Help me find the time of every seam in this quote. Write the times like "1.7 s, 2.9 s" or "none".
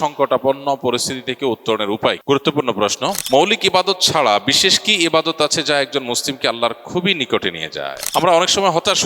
3.2 s, 8.0 s